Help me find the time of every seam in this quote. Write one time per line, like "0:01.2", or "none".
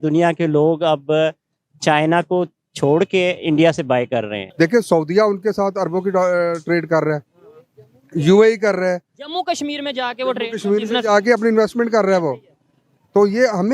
0:04.4

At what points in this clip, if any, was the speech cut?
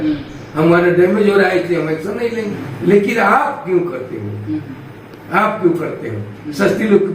0:02.6

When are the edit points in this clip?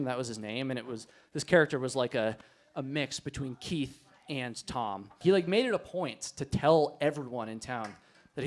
0:05.2

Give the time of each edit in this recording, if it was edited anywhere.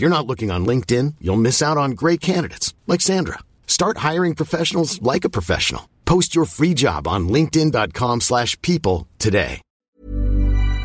0:09.7

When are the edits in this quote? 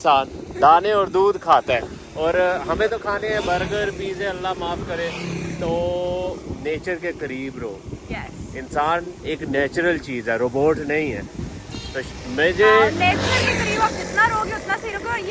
none

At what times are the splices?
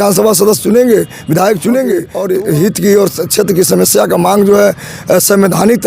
0:02.1

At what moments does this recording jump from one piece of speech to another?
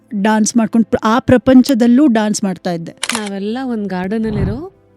0:03.3

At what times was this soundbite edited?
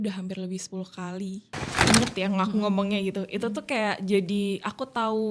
0:01.8

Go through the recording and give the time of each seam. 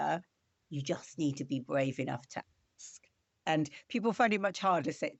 none

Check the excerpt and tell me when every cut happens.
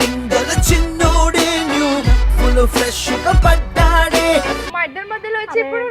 0:04.7

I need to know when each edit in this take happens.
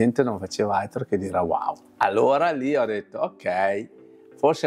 0:01.8

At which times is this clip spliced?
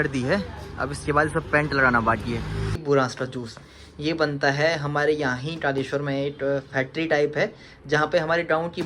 0:02.8

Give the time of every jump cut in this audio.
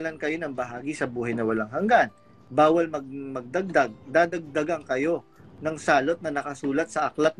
0:02.1

